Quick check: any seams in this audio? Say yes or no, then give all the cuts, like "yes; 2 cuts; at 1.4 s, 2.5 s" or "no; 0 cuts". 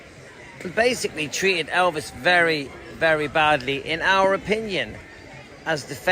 yes; 1 cut; at 1.0 s